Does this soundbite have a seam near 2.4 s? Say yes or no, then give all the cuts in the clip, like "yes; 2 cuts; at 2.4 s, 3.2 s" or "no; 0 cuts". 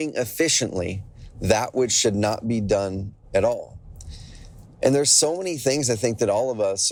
no; 0 cuts